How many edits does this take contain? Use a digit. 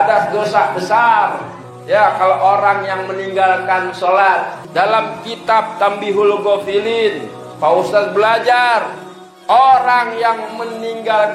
1